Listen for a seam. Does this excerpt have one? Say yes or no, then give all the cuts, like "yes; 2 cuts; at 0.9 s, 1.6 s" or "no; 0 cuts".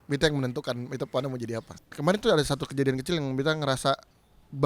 yes; 1 cut; at 1.8 s